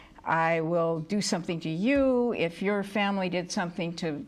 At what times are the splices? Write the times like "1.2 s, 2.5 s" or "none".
none